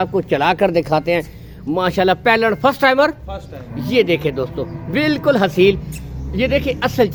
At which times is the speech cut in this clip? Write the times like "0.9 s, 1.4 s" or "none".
none